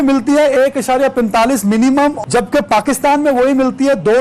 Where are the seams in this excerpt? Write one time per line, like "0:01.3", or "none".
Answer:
0:02.2